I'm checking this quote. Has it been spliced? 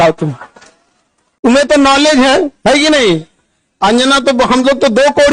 no; 0 cuts

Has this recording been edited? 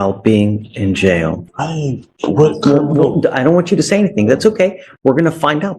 yes; 1 cut; at 1.4 s

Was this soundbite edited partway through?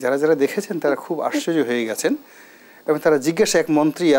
no; 0 cuts

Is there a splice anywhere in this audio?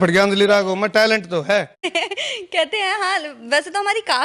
yes; 1 cut; at 1.8 s

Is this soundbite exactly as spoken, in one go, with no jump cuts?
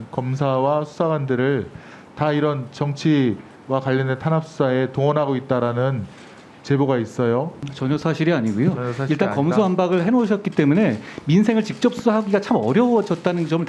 no; 1 cut; at 7.7 s

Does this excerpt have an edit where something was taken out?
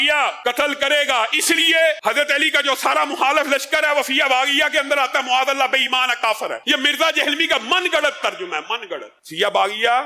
no; 0 cuts

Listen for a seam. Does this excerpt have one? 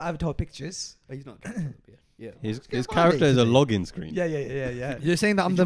no; 0 cuts

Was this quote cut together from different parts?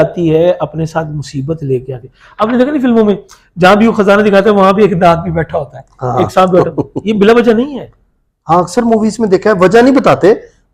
no; 0 cuts

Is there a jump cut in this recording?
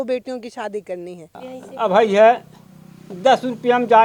yes; 1 cut; at 1.5 s

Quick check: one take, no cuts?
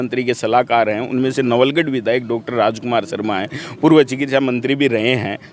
yes; 0 cuts

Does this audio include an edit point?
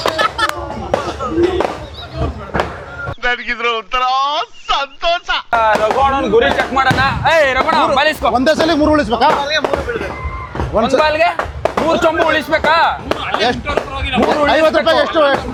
no; 0 cuts

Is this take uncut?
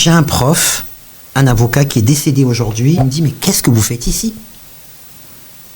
no; 1 cut; at 3.0 s

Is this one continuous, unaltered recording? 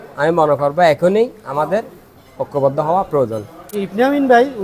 no; 1 cut; at 3.6 s

